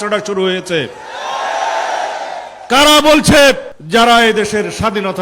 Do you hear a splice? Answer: no; 0 cuts

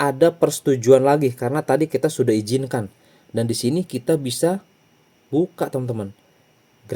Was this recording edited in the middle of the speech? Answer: no; 0 cuts

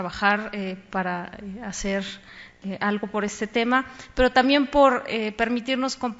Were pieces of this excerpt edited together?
no; 0 cuts

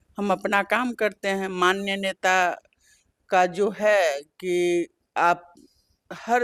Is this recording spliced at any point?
no; 0 cuts

